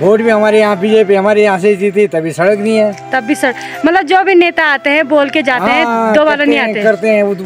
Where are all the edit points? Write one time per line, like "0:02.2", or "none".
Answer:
none